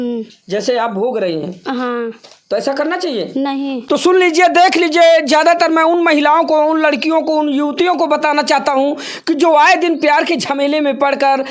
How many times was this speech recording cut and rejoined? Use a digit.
1